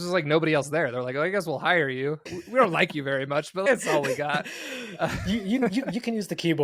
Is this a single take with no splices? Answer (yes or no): yes